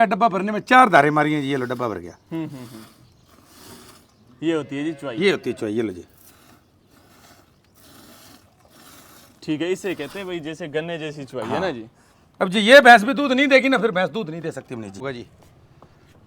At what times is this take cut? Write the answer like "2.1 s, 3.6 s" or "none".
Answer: 15.0 s